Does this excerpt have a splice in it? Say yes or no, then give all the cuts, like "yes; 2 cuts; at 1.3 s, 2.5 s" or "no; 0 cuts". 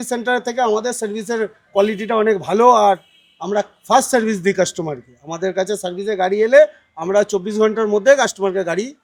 no; 0 cuts